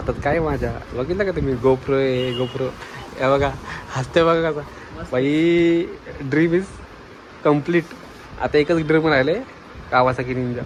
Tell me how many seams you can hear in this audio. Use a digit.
0